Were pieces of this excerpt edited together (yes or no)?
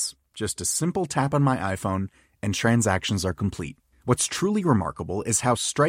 no